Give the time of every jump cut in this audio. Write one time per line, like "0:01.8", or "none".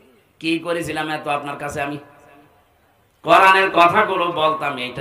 none